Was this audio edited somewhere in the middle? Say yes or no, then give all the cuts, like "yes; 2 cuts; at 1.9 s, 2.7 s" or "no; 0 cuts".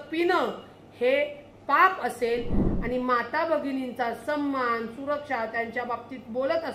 yes; 1 cut; at 2.6 s